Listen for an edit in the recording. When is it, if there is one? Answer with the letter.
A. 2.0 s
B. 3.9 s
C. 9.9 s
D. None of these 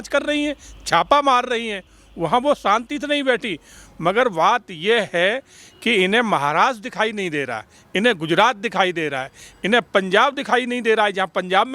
D